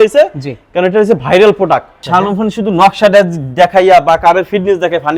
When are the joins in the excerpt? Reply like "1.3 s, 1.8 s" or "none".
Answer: 2.0 s